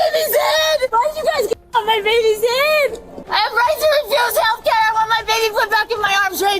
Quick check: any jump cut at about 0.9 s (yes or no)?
yes